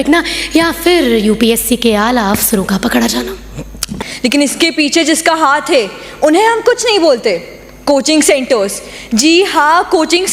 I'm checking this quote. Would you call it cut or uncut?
cut